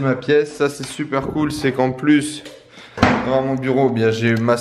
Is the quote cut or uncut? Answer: uncut